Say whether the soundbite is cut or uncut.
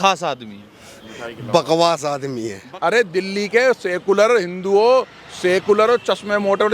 cut